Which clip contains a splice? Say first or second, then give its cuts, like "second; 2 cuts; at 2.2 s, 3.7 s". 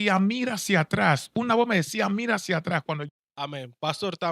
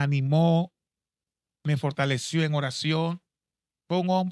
first; 1 cut; at 3.0 s